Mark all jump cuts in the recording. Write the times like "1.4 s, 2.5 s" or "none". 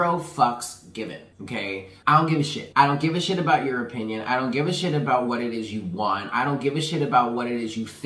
1.7 s, 2.6 s

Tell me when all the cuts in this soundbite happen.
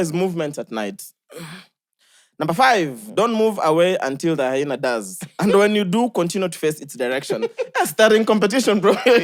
none

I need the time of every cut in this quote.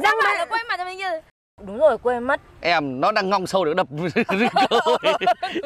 1.4 s

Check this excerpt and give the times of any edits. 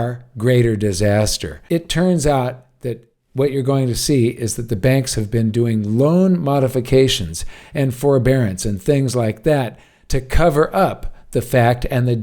1.5 s

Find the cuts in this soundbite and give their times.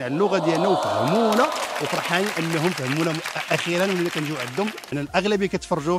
4.9 s

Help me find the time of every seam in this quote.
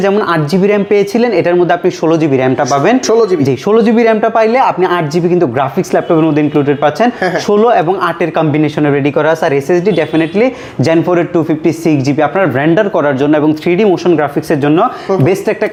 none

